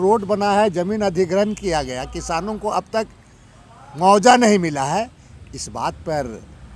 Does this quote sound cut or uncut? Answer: uncut